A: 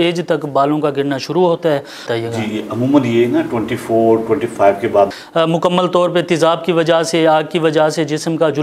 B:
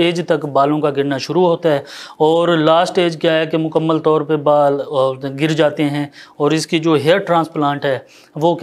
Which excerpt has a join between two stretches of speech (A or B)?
A